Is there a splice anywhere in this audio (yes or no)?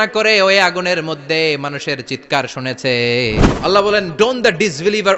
yes